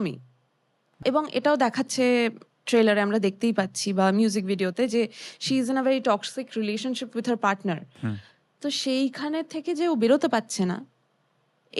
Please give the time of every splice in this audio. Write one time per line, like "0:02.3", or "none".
0:01.0